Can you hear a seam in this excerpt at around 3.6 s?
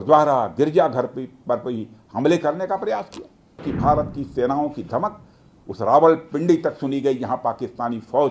yes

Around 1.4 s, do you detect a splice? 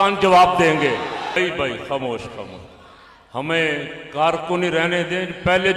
yes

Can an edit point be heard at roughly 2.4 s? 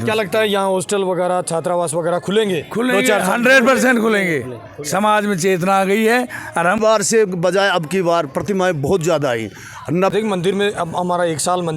no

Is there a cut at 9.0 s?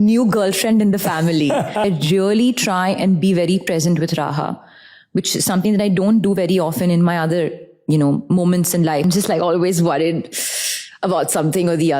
yes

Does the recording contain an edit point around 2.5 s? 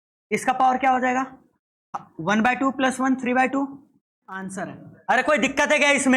no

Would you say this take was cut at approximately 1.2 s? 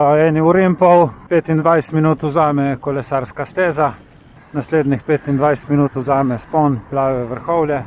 yes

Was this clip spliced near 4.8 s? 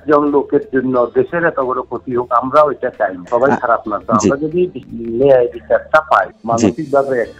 yes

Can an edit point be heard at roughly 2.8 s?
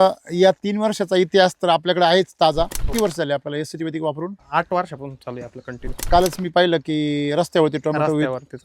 yes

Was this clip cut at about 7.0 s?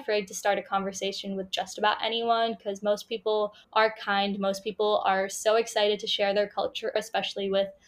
yes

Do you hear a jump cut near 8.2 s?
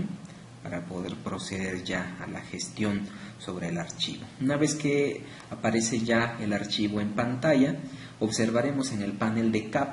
no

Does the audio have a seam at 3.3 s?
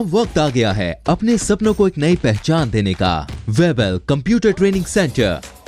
yes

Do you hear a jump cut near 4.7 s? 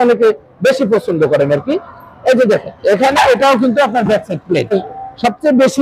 yes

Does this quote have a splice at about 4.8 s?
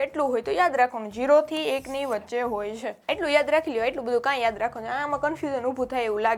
no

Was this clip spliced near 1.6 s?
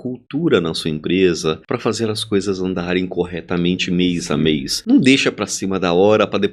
yes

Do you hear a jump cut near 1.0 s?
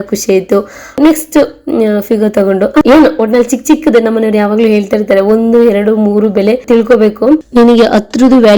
yes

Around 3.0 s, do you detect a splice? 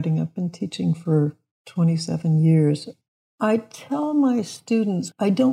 yes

